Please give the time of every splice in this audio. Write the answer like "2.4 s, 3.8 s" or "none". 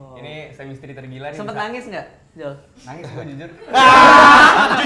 none